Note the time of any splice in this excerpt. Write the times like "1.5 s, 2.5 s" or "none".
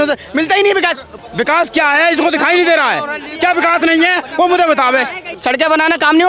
1.1 s, 5.2 s

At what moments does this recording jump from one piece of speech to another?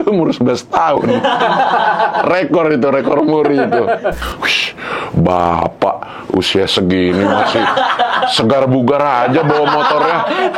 4.2 s

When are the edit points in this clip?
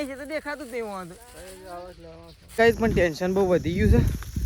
2.6 s

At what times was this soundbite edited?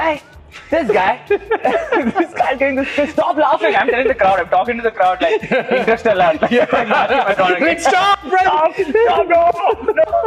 none

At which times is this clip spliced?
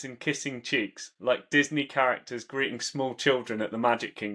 none

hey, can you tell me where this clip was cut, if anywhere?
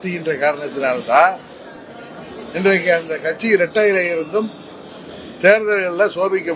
none

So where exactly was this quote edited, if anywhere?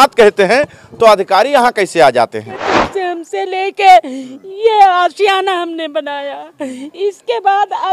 2.7 s

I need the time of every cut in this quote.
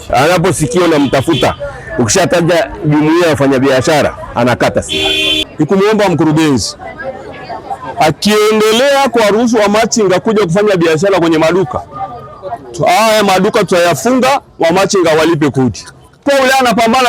5.3 s, 16.2 s

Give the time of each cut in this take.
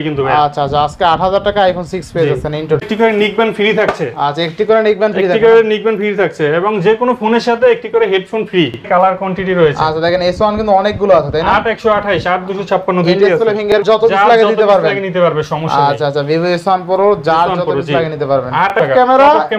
2.8 s, 8.8 s, 13.7 s, 18.8 s

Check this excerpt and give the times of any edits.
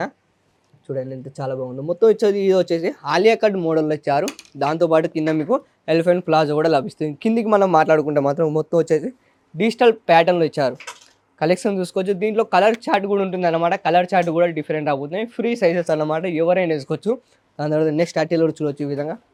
none

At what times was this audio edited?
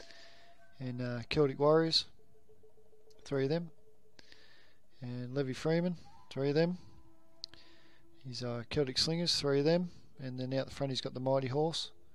5.1 s

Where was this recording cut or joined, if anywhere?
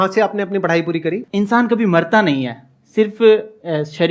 1.2 s

